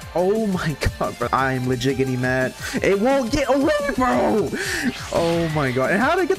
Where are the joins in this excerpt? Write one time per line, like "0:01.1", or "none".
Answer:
0:01.3